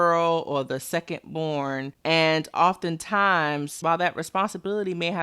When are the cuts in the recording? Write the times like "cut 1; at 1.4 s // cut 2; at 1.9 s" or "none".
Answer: cut 1; at 1.9 s